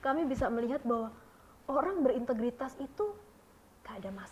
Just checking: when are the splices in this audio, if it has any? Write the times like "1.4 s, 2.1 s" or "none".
none